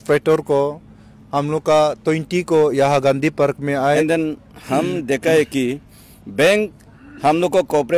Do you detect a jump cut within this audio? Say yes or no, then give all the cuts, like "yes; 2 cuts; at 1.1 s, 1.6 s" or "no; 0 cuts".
yes; 1 cut; at 3.8 s